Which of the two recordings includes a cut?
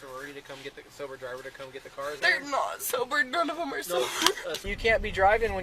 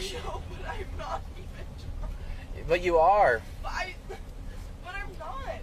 first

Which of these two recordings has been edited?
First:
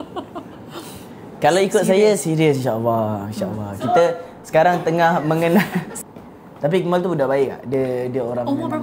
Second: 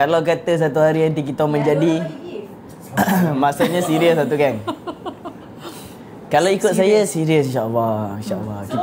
first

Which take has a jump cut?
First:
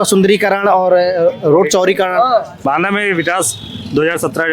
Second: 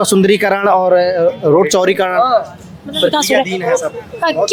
first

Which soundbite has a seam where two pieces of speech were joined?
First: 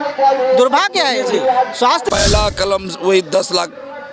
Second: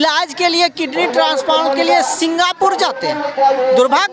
first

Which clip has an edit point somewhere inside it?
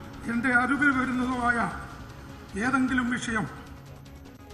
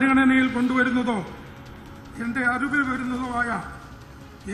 first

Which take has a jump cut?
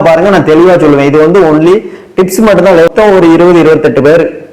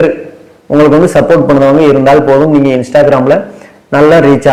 first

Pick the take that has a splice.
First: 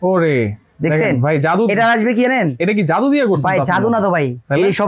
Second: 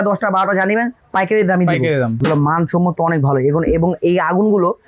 second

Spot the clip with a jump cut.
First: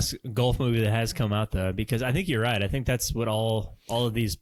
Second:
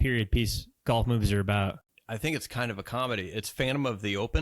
second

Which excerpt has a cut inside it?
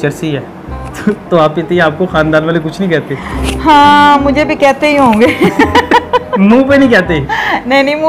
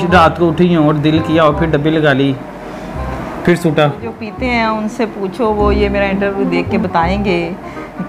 second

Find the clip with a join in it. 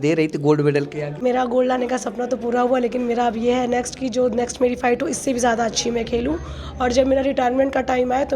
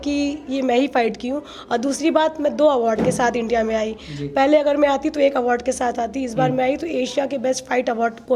first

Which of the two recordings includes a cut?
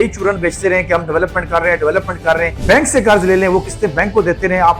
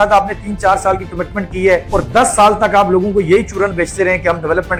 first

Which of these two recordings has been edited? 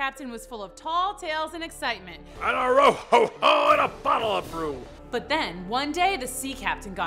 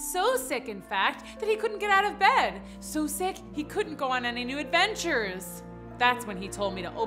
first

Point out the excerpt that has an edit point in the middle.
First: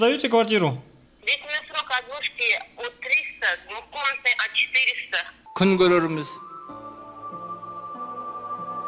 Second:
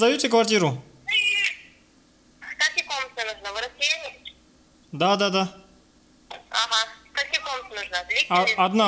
first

